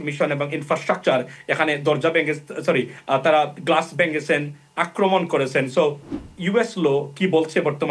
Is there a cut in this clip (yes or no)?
no